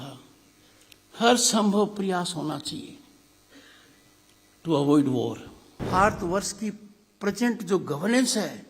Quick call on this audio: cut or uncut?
cut